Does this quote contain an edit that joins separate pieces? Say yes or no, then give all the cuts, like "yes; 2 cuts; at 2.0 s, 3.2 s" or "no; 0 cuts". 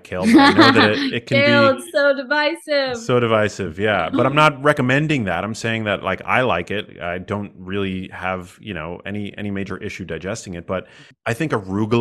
yes; 1 cut; at 11.0 s